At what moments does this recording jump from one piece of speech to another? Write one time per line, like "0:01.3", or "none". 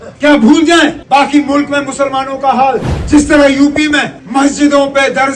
0:01.0
0:02.9
0:04.2